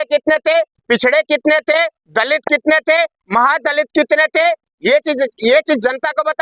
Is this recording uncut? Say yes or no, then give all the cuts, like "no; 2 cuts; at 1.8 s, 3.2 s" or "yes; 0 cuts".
yes; 0 cuts